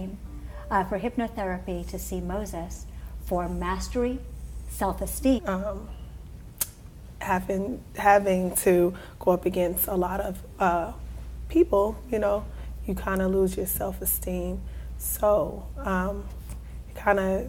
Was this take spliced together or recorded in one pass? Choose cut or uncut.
uncut